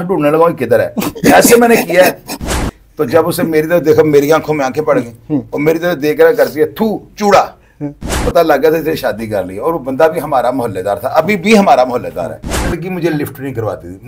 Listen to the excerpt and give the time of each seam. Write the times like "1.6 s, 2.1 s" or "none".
2.4 s, 8.2 s, 12.8 s